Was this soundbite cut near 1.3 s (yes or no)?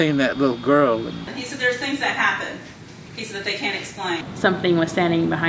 yes